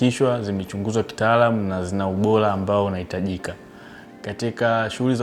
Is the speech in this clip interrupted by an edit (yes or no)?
no